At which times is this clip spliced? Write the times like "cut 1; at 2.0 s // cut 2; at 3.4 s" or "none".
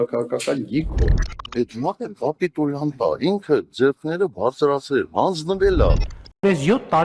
none